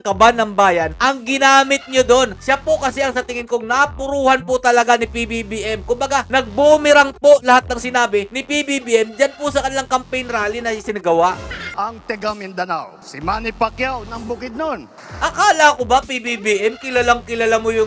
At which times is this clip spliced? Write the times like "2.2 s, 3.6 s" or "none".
2.4 s, 11.7 s